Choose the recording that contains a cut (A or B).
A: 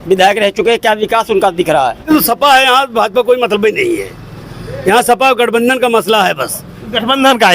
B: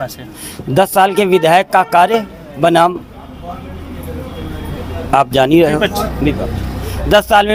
A